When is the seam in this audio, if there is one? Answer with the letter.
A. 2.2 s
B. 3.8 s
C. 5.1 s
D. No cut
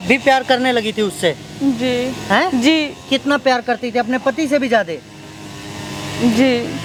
D